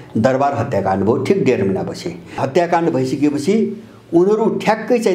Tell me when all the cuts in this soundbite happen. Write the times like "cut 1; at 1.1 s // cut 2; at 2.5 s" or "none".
cut 1; at 2.4 s